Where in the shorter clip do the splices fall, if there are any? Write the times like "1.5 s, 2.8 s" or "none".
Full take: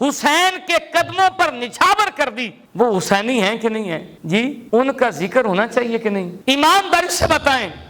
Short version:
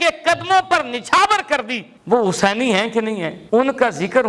3.4 s